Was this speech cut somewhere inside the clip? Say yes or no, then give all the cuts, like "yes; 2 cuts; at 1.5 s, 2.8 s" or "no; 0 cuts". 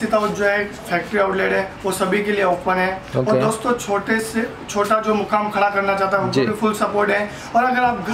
no; 0 cuts